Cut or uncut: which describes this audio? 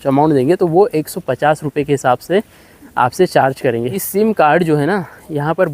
cut